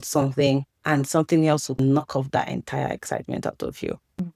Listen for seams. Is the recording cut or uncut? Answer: uncut